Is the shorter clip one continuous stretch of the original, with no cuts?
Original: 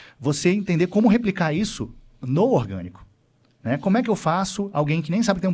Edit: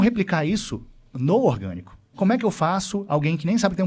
no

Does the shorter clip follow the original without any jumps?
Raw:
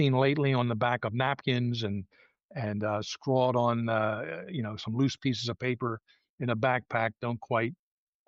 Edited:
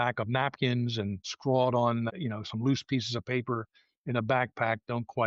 no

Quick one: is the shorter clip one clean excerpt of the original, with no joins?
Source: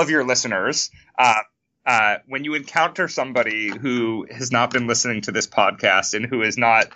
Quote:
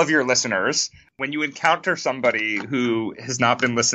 no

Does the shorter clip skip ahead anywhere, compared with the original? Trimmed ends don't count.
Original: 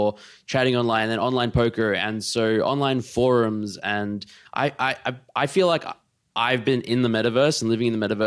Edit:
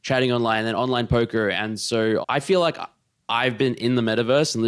yes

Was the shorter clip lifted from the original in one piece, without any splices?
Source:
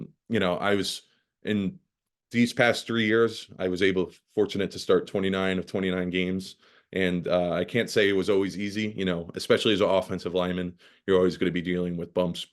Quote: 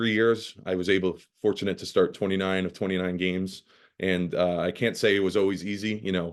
yes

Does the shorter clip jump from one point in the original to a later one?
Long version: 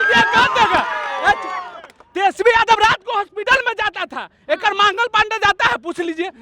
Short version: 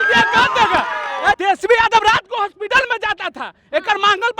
yes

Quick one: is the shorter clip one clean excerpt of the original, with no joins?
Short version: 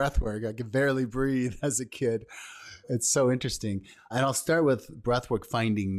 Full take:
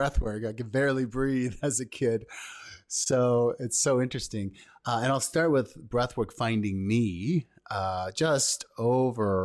no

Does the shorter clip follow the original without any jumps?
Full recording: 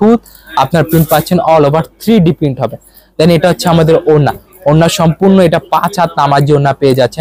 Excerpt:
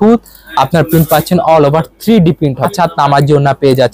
no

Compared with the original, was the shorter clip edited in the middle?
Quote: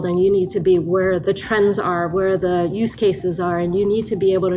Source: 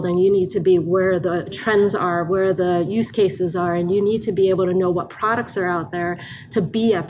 yes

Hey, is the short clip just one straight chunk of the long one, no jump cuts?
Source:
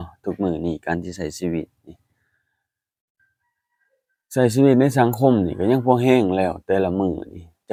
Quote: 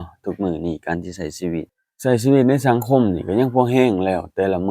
no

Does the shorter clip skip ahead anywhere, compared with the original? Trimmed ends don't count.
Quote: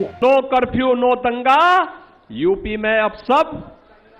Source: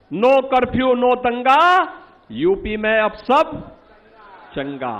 no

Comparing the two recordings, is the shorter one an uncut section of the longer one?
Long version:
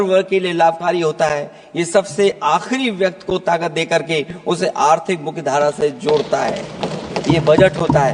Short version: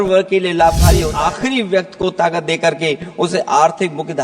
no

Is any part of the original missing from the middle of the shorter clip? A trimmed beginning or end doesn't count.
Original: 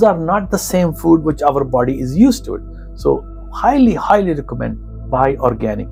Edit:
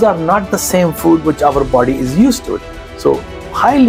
no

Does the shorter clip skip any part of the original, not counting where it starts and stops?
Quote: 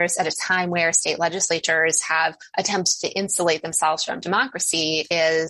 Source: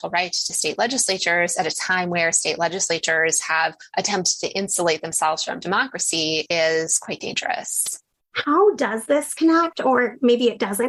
no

